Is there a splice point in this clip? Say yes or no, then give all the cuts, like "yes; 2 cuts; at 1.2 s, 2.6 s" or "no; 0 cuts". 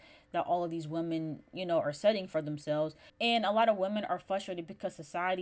no; 0 cuts